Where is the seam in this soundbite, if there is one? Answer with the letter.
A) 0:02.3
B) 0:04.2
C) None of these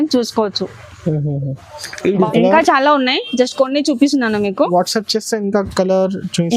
A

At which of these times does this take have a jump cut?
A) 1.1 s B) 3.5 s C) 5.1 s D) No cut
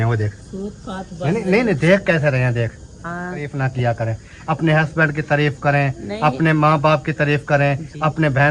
B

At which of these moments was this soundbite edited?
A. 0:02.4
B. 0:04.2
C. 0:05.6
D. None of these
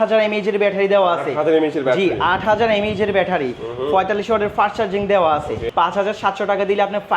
C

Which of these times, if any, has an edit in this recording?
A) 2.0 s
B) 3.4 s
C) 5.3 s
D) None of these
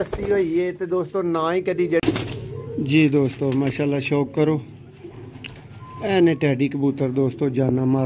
A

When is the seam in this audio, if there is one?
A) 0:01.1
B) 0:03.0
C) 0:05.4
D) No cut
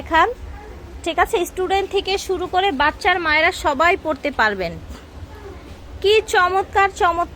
D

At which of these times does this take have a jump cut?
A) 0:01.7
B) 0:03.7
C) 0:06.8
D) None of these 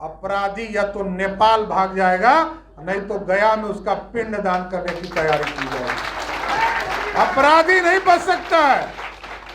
D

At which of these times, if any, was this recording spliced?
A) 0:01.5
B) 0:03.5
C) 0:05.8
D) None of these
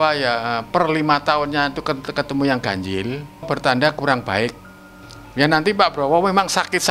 B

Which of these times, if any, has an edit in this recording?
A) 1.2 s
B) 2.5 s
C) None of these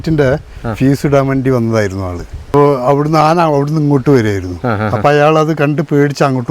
B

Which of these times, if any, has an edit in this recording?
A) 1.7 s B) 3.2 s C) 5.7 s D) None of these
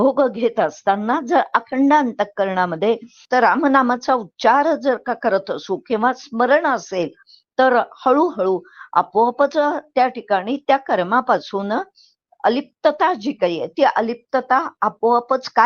B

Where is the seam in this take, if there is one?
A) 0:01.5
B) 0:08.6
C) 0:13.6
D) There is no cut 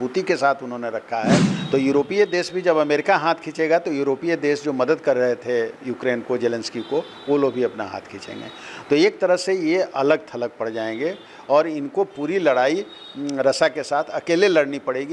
A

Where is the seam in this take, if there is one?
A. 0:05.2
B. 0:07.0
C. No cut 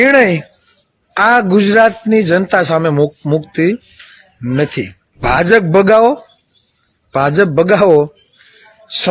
A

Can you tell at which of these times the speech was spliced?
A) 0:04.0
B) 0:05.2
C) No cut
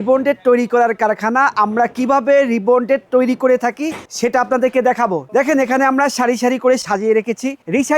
B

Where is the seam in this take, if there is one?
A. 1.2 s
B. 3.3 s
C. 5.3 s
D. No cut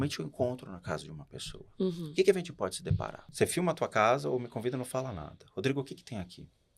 B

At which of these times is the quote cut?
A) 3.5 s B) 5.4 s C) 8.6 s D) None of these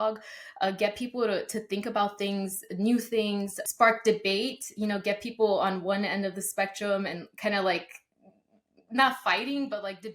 A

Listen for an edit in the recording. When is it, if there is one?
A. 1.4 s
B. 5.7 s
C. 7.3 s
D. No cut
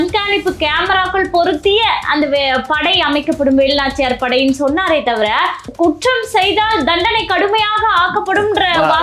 B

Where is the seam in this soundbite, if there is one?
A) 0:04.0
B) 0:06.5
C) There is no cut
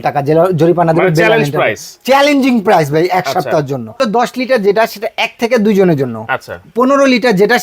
A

